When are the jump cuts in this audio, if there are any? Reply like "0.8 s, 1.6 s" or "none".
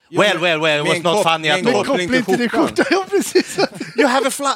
none